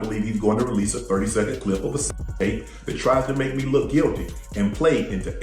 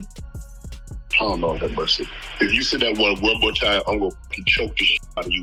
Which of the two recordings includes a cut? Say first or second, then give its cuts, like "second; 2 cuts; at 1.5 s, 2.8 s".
first; 1 cut; at 4.3 s